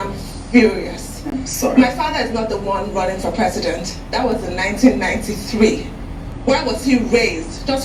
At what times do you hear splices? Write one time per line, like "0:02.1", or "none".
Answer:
none